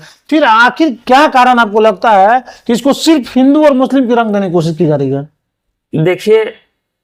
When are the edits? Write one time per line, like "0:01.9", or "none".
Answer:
none